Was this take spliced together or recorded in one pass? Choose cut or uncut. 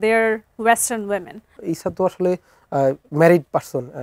cut